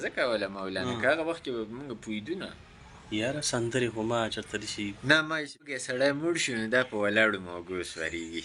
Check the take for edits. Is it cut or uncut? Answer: cut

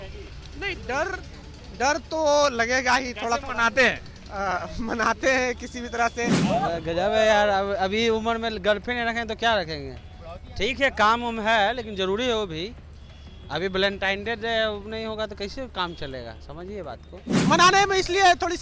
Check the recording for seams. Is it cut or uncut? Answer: cut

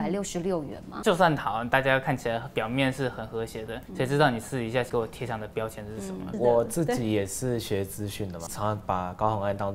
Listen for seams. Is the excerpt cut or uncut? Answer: cut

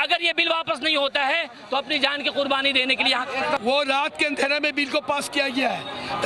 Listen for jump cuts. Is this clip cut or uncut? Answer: cut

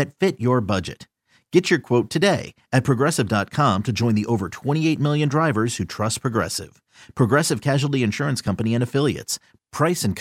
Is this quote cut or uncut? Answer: uncut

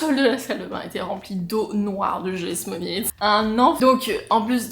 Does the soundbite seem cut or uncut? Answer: uncut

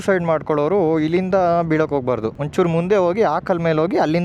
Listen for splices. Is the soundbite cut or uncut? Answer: cut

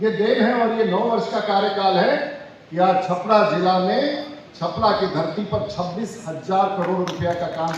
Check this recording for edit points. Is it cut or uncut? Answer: uncut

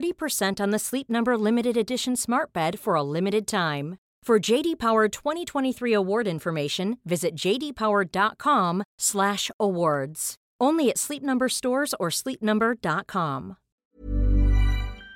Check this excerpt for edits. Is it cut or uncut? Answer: cut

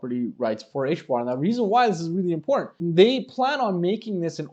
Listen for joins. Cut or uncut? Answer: cut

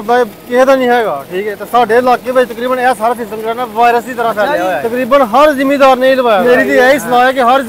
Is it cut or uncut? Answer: cut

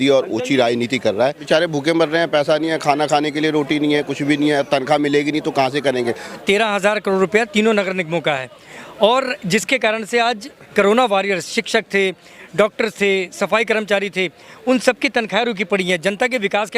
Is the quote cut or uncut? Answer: cut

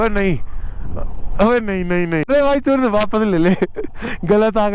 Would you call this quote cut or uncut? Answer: cut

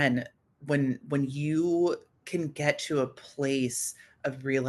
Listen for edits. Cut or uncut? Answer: uncut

